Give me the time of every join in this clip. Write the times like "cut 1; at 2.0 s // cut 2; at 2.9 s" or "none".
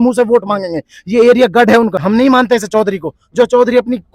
cut 1; at 2.0 s